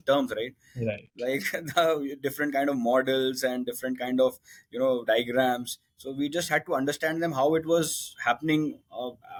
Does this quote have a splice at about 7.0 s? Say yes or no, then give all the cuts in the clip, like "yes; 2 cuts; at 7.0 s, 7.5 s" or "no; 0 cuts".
no; 0 cuts